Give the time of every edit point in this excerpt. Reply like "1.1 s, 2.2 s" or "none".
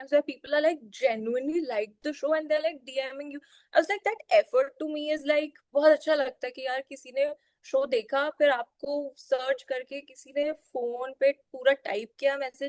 none